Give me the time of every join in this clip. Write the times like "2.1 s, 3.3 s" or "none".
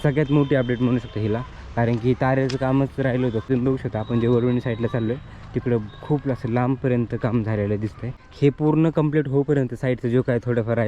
3.5 s, 8.2 s